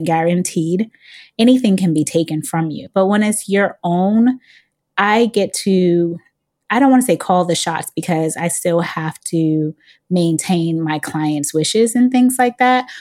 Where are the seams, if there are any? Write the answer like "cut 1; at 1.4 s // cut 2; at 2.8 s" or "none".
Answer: cut 1; at 2.8 s